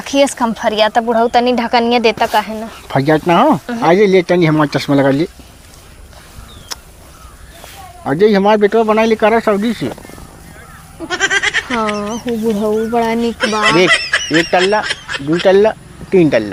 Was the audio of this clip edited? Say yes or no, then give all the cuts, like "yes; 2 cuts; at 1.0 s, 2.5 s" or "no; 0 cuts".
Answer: no; 0 cuts